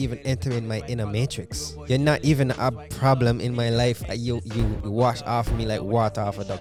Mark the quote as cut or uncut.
uncut